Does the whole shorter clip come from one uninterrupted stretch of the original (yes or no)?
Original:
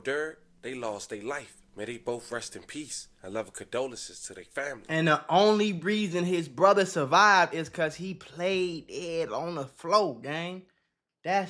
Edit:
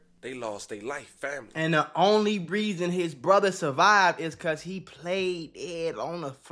no